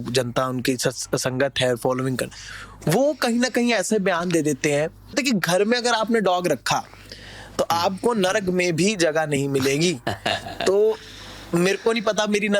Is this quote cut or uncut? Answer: cut